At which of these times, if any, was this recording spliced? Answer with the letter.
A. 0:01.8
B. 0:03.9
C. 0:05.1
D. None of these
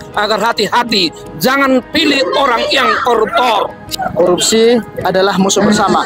B